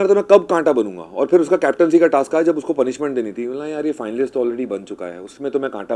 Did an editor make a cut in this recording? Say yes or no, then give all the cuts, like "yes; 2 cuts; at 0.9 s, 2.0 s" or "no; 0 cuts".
no; 0 cuts